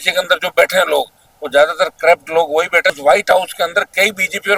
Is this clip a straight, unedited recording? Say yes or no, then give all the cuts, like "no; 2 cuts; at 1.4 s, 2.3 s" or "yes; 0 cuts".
no; 1 cut; at 3.0 s